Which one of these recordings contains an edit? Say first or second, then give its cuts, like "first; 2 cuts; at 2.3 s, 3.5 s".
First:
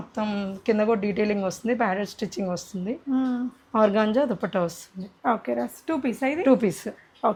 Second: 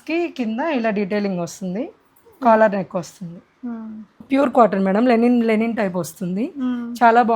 second; 1 cut; at 4.1 s